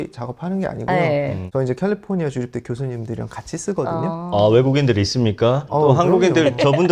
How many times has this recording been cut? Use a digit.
1